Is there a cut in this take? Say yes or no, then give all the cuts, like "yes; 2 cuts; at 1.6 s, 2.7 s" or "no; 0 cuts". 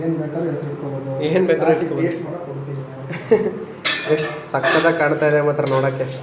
no; 0 cuts